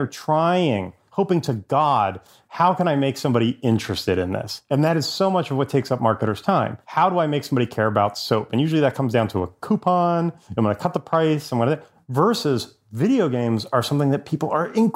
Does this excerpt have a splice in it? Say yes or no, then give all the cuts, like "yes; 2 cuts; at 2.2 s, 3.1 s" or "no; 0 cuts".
yes; 4 cuts; at 1.0 s, 4.5 s, 6.8 s, 10.4 s